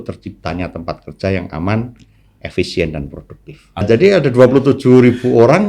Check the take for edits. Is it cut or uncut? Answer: cut